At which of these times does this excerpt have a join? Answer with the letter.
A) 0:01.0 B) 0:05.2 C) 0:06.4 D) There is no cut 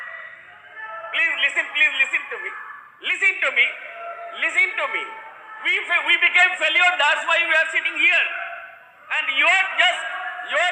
D